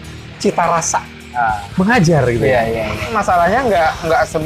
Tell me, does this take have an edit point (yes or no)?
yes